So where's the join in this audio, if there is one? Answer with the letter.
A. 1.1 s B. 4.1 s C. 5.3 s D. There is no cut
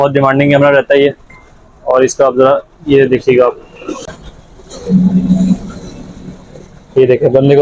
B